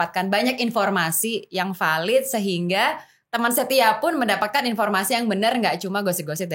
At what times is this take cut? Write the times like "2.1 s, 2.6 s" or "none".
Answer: none